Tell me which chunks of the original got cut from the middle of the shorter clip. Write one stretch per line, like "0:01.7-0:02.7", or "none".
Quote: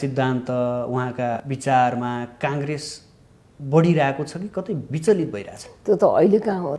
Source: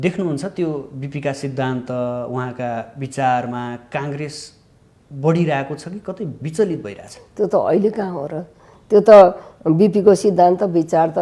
0:02.9-0:03.0

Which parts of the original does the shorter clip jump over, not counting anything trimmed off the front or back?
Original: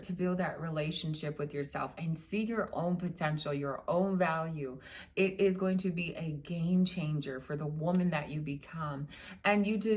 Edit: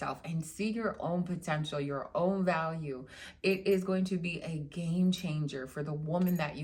none

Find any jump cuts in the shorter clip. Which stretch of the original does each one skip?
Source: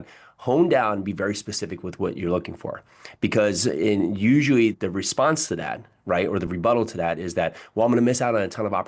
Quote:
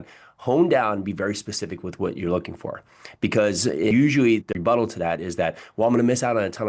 0:03.9-0:04.2
0:04.9-0:06.5

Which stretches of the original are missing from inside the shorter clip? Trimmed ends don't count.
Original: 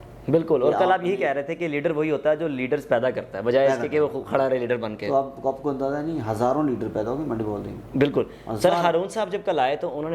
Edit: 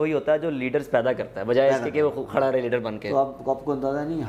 none

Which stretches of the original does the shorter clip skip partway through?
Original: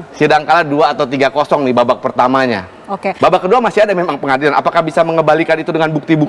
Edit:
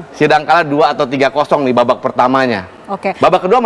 none

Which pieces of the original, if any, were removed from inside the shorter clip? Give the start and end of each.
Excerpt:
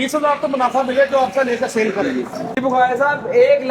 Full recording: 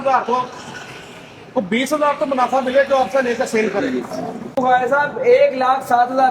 0:04.3-0:04.4

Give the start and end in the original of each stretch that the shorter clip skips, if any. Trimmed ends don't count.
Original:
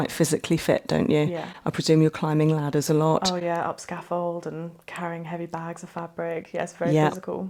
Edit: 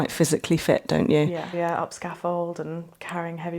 0:01.5-0:03.4

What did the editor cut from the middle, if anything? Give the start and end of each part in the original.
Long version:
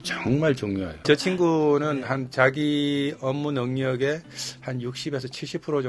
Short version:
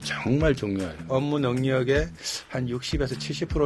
0:01.0-0:03.1

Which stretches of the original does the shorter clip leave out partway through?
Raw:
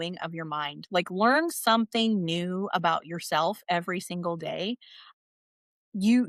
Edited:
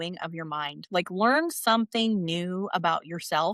none

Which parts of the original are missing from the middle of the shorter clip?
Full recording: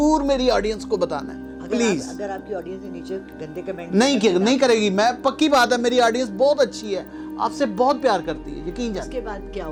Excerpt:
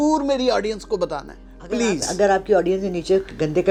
none

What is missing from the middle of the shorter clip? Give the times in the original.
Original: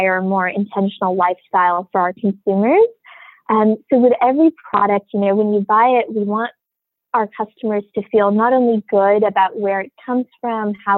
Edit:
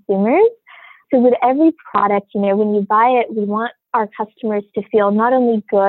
0:03.4-0:03.8
0:06.6-0:07.0

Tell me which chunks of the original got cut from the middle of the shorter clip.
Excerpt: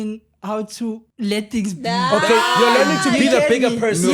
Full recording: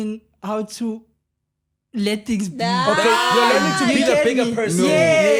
0:01.1-0:01.8

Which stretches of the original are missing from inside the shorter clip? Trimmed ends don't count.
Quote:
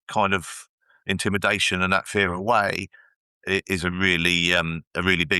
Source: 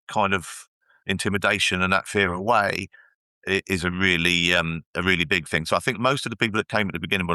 none

